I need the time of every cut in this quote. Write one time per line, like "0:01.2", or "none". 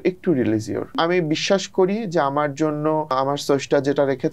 0:00.9
0:03.1

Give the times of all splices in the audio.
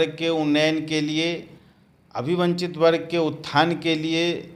none

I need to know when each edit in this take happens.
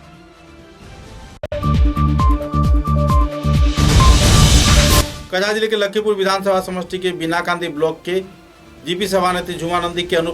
0:01.5
0:05.0

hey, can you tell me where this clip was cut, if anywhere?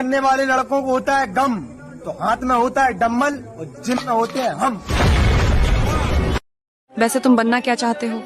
0:06.4

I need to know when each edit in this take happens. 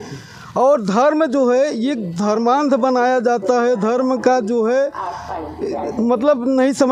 none

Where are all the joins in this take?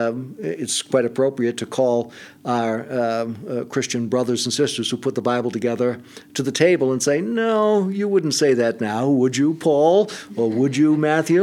none

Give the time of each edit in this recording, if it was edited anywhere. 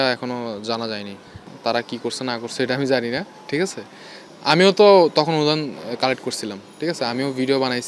0:01.5

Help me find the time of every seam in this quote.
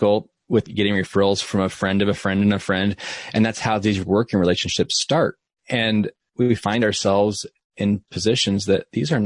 0:06.2

